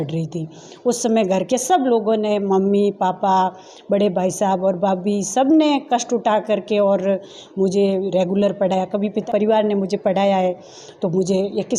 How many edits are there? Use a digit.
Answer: 1